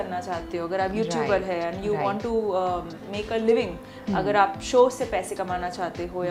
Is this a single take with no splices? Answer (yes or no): yes